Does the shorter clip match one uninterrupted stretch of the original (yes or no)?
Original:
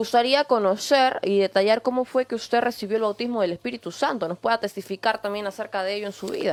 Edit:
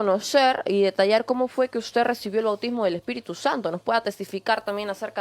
yes